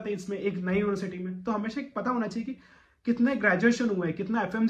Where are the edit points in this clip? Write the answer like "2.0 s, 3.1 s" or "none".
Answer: none